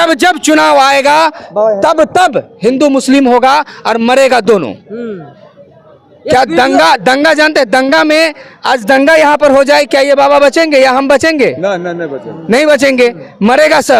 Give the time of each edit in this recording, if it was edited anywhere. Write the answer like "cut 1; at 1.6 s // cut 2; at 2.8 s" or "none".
none